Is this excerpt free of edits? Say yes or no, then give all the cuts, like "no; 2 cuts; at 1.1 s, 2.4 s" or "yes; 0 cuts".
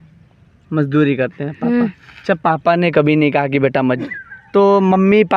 no; 1 cut; at 4.0 s